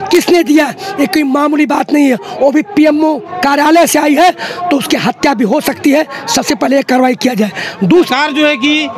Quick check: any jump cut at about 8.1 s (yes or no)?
yes